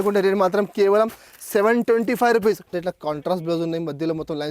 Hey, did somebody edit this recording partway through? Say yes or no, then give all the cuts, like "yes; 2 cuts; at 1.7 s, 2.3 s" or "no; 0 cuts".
yes; 1 cut; at 2.7 s